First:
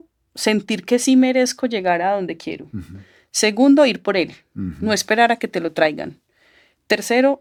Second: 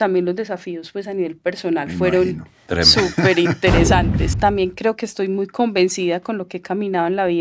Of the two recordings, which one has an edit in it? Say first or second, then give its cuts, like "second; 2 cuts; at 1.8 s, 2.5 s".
second; 1 cut; at 4.2 s